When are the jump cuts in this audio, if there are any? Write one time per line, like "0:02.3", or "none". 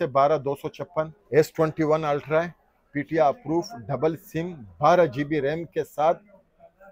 0:01.2